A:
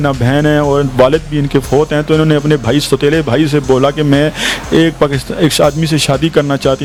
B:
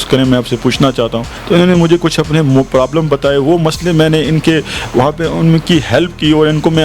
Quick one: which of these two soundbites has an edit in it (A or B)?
B